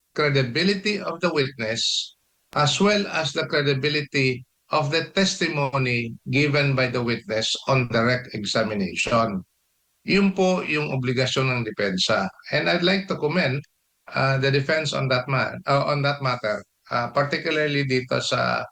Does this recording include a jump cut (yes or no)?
no